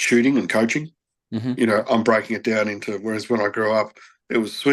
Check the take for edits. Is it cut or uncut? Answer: uncut